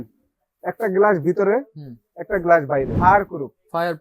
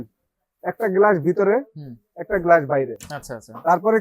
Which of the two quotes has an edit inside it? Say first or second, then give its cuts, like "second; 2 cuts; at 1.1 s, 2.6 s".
first; 1 cut; at 2.9 s